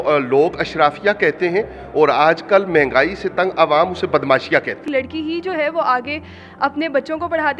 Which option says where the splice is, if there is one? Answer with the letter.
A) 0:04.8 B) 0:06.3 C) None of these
A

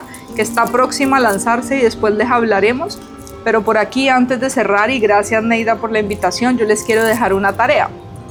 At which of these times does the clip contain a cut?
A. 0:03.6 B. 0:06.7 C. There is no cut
C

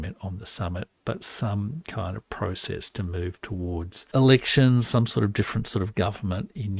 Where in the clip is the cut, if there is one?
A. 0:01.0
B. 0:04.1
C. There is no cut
B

